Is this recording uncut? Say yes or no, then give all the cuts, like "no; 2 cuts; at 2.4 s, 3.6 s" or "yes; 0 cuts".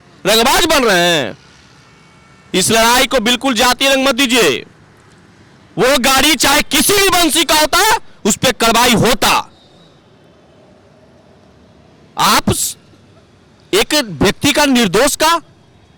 yes; 0 cuts